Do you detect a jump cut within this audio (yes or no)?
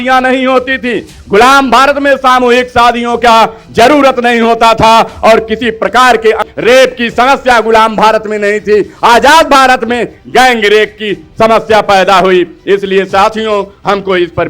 yes